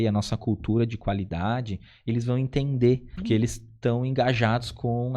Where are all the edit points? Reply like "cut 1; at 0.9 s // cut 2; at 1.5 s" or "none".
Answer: cut 1; at 3.1 s